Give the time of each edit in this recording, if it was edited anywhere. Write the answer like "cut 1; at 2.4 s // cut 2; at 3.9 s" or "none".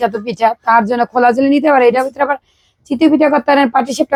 none